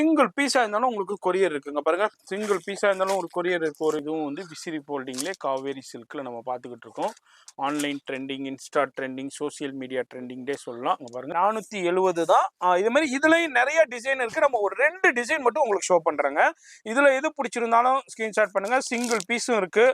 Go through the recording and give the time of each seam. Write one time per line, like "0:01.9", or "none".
0:04.0
0:11.3

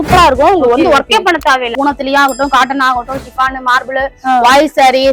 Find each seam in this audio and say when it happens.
0:01.7

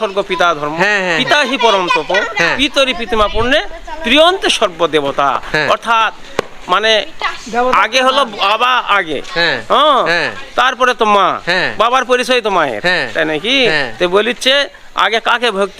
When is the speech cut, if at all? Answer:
none

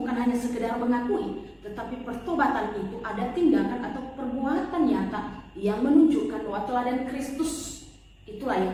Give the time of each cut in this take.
none

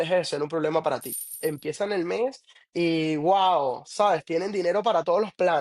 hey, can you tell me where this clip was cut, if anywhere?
0:01.4

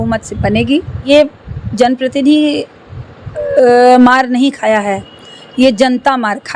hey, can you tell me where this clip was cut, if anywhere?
0:01.1

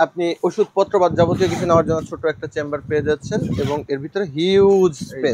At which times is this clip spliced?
none

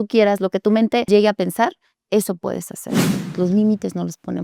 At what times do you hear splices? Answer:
0:01.1
0:03.1

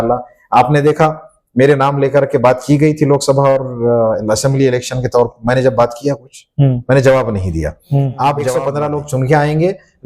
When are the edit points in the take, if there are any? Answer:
0:08.7

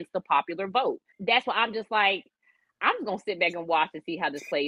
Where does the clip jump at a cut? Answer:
0:01.1

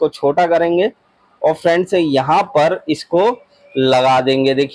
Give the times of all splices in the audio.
none

